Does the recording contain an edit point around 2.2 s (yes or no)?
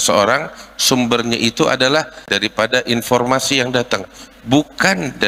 yes